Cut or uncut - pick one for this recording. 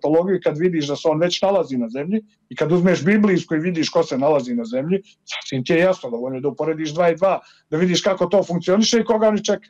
uncut